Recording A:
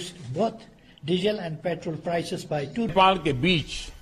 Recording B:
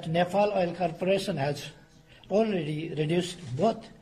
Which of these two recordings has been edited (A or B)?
A